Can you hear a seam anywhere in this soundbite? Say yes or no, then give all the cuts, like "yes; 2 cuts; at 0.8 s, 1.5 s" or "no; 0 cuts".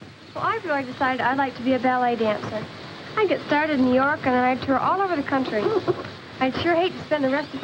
yes; 1 cut; at 4.8 s